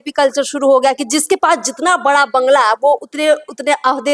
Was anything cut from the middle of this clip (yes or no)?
no